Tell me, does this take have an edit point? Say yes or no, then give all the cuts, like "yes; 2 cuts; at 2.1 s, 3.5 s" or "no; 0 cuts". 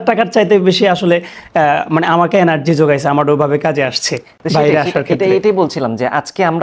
no; 0 cuts